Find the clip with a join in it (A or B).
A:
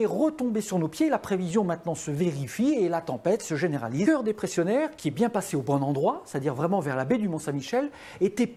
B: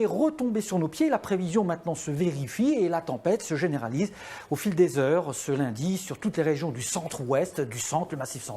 B